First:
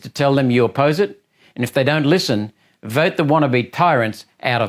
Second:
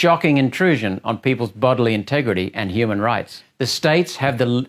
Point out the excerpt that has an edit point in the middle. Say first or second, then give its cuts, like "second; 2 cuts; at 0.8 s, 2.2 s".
second; 1 cut; at 3.4 s